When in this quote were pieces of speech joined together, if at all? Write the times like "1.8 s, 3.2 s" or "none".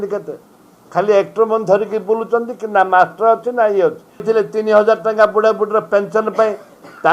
4.2 s